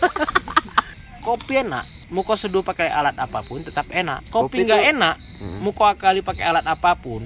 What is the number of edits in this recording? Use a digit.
3